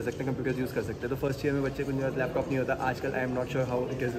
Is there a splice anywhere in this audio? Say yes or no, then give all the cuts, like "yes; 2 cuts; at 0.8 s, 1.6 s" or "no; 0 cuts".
no; 0 cuts